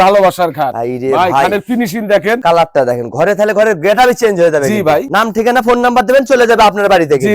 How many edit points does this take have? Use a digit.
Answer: 2